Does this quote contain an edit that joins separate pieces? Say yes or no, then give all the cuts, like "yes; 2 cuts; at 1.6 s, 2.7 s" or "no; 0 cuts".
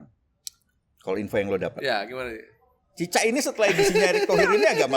no; 0 cuts